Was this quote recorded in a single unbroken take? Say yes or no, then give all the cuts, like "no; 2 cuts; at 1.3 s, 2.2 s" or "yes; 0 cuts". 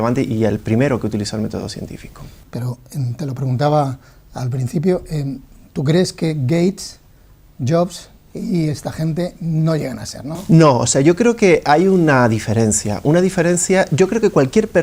yes; 0 cuts